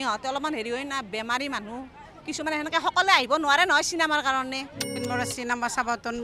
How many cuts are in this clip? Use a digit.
1